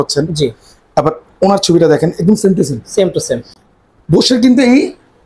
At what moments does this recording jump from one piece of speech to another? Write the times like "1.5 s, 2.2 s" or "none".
none